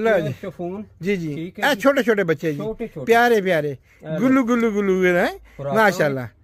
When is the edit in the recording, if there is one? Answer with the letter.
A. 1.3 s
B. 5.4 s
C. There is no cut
C